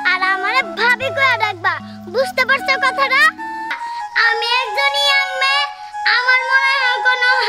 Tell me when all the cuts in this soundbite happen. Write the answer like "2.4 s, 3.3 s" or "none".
3.7 s

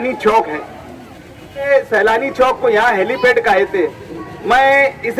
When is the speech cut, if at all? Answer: 1.7 s

